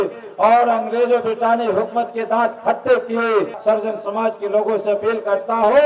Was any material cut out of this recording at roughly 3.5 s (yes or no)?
yes